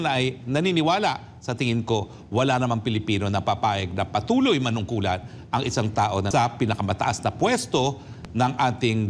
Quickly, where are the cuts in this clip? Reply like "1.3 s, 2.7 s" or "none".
6.3 s